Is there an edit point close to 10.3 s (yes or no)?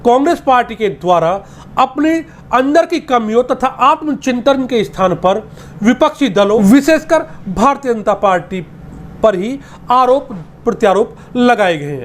no